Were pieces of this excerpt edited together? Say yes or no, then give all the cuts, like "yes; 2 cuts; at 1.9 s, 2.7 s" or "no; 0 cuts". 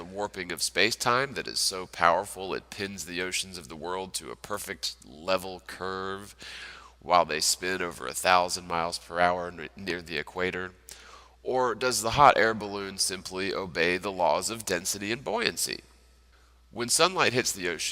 no; 0 cuts